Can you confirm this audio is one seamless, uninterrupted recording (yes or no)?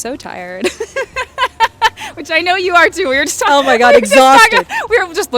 yes